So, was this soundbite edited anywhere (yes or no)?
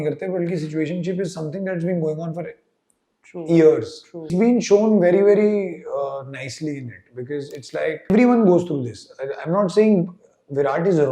yes